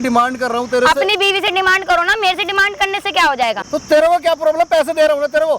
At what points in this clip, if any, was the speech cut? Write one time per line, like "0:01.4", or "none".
0:03.6